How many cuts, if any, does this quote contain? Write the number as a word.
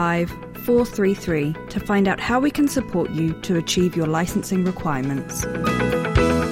one